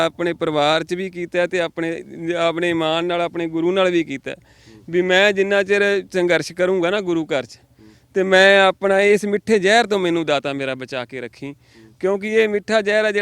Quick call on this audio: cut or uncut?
uncut